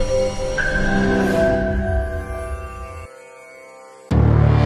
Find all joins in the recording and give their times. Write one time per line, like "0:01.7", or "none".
none